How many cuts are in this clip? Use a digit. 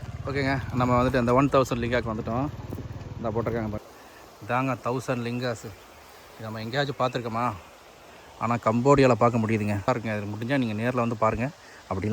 2